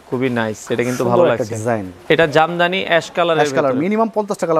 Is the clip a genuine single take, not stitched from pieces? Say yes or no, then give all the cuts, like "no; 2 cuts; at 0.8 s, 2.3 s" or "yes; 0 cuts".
no; 1 cut; at 1.9 s